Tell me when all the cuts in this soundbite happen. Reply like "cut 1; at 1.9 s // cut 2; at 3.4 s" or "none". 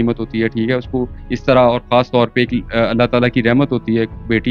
none